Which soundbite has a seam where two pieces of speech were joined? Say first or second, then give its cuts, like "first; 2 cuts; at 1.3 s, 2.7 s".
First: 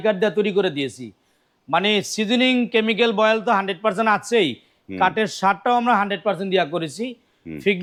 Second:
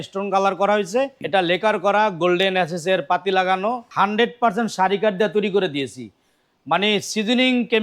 second; 2 cuts; at 1.2 s, 3.8 s